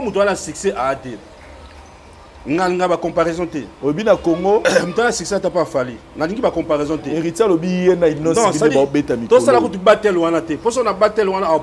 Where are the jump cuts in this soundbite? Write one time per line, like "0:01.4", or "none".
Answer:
none